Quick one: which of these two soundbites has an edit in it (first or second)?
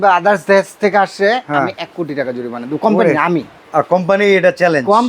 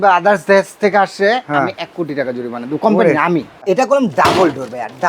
second